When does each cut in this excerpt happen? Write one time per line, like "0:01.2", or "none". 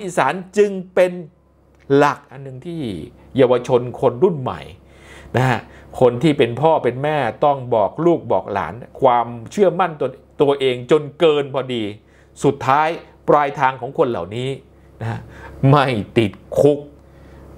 none